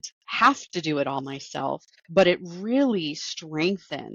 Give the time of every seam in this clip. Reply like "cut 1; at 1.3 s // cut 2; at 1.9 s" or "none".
cut 1; at 1.9 s